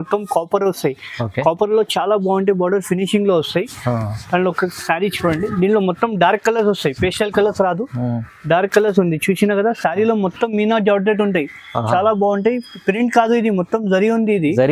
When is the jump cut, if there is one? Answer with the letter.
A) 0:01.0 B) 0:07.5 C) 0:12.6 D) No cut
D